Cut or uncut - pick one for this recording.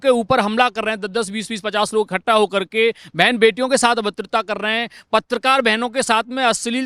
uncut